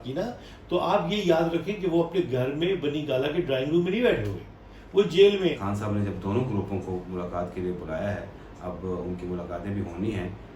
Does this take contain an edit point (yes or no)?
yes